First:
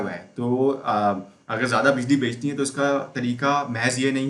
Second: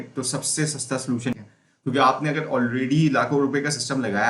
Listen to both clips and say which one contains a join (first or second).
second